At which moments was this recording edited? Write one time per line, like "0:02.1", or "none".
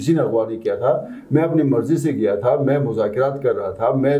none